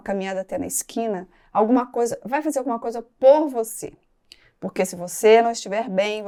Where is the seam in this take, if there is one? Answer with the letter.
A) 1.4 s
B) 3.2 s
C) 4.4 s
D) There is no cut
D